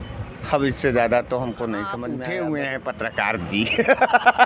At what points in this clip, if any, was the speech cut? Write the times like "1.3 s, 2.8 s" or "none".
2.0 s